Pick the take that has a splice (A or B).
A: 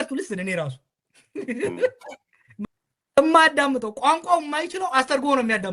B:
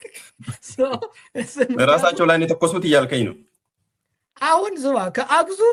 A